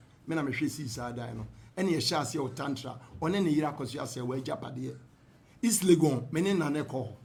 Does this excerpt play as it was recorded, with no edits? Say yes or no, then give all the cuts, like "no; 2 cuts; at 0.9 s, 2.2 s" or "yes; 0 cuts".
yes; 0 cuts